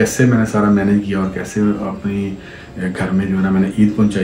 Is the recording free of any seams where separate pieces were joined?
yes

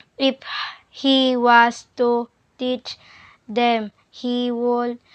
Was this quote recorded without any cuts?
yes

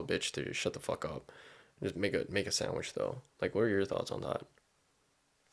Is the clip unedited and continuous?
yes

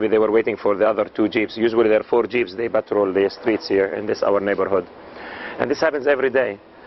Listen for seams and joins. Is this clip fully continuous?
no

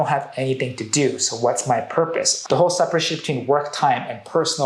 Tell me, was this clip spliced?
yes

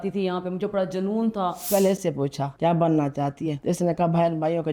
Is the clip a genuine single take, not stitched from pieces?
no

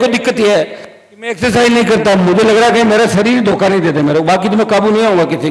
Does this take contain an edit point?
no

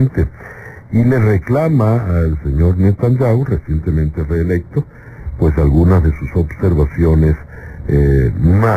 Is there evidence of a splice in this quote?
yes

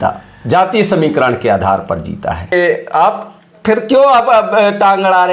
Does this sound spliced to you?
yes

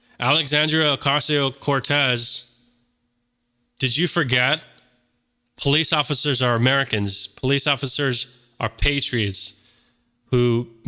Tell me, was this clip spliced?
no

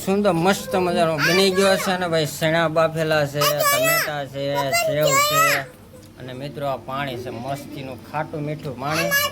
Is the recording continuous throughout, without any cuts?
yes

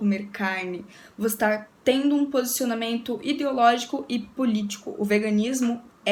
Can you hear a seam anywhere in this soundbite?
no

